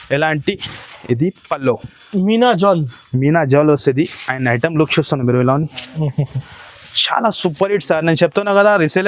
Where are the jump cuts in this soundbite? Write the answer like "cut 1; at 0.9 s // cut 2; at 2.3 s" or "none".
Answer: none